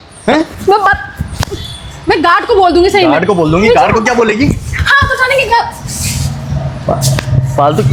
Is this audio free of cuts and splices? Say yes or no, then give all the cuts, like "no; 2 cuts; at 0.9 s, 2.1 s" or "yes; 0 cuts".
yes; 0 cuts